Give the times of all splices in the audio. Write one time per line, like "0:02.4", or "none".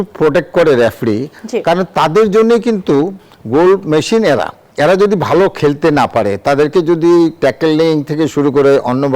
0:04.6